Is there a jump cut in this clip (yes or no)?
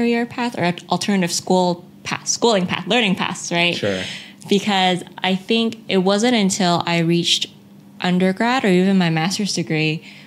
no